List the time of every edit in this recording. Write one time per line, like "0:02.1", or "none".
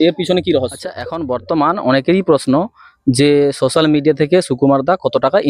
0:01.1

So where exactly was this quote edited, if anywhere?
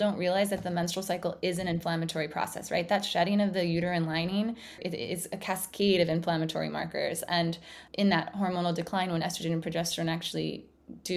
0:04.8
0:07.8

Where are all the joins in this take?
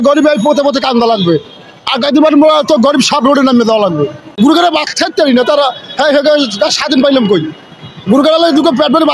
0:04.2

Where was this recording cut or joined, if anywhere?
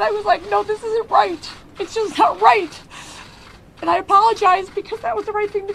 0:02.5

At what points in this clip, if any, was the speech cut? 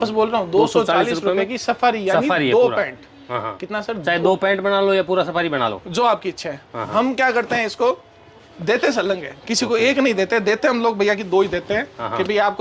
none

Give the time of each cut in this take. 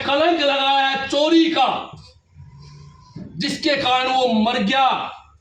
none

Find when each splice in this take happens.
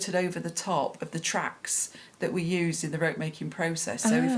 none

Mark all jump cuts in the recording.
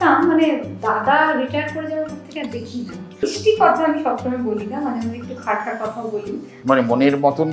0:03.3
0:06.5

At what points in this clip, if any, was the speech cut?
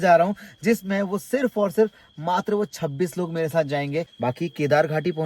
0:04.1

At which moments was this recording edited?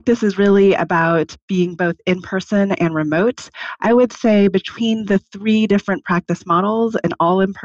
0:01.3

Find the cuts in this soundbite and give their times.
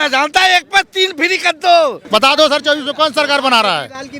0:02.0

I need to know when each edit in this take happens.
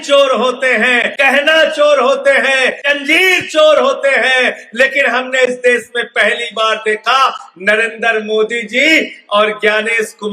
0:01.1
0:02.8

